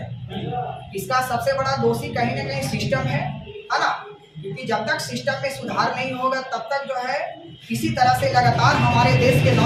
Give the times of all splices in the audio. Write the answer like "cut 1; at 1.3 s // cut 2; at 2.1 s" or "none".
none